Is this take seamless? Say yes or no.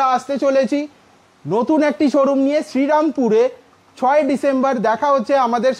yes